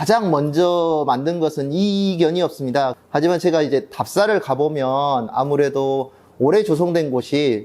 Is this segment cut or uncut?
cut